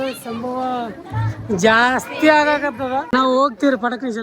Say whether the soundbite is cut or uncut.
cut